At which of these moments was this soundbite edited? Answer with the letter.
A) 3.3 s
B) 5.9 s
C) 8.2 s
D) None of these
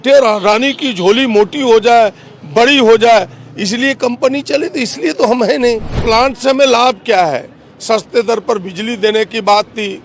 B